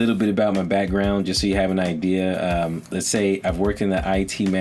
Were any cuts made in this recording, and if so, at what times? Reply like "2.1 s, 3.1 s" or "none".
none